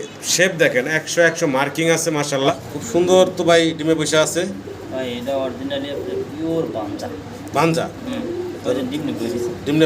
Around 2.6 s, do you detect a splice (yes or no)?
yes